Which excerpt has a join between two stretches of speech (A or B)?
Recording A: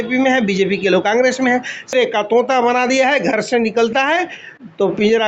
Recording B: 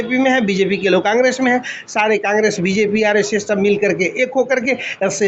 A